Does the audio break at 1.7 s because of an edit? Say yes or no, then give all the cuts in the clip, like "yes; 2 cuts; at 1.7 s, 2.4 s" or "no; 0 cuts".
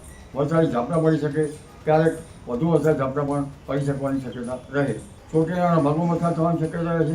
no; 1 cut; at 5.1 s